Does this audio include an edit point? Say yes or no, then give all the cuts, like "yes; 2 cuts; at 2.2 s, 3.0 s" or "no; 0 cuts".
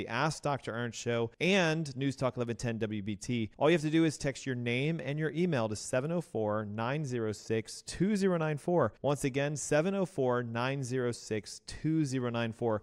no; 0 cuts